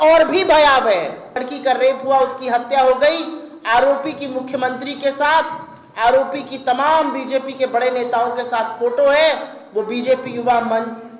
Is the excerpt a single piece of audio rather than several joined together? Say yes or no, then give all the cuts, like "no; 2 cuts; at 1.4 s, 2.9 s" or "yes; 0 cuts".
no; 1 cut; at 1.5 s